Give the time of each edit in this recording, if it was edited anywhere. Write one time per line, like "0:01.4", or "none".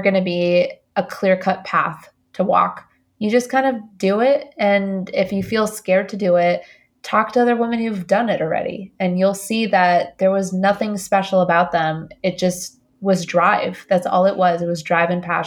none